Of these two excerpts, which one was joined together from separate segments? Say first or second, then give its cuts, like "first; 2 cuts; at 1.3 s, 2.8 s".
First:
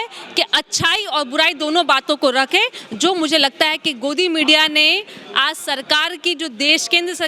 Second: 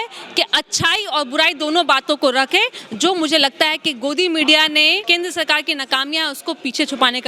second; 1 cut; at 5.0 s